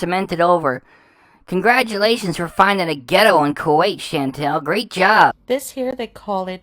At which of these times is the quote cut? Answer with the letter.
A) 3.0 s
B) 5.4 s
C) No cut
B